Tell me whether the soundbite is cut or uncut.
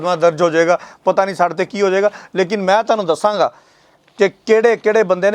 uncut